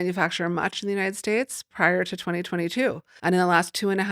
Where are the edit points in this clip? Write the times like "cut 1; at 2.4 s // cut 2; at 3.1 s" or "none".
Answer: cut 1; at 3.1 s